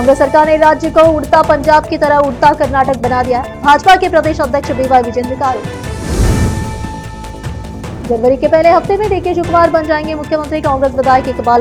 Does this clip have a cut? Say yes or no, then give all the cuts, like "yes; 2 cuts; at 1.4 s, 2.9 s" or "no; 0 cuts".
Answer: no; 0 cuts